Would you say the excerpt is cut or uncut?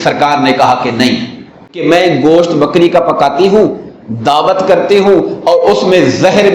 cut